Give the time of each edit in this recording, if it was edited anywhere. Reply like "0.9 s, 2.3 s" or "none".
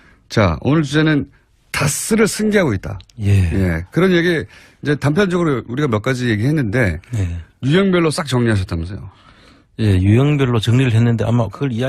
1.7 s